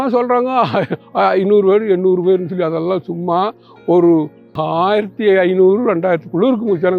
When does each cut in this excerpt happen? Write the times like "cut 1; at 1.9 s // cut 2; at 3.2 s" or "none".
cut 1; at 4.5 s